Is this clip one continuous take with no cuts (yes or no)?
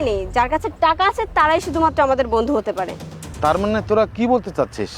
yes